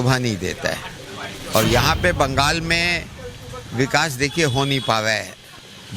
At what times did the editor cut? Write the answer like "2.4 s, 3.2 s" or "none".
1.4 s